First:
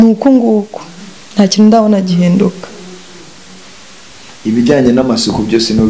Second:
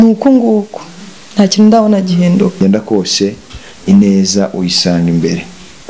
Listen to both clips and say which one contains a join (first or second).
second